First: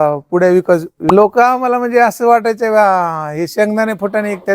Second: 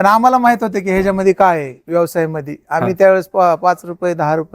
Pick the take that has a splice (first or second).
first